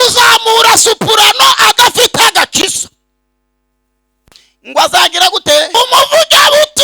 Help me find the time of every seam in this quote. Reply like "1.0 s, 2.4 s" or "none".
5.7 s